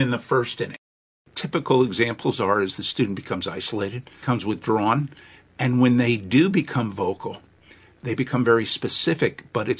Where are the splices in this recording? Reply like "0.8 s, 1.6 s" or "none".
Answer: 0.9 s, 4.1 s, 8.0 s